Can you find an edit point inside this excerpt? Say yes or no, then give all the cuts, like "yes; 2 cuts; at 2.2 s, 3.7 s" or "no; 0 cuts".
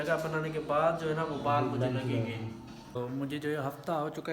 yes; 1 cut; at 3.1 s